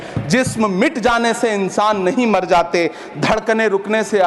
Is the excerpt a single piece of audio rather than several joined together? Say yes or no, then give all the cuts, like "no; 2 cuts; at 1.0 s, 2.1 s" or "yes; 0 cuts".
yes; 0 cuts